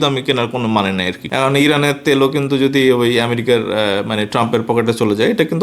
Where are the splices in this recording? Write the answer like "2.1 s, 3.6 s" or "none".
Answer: 1.2 s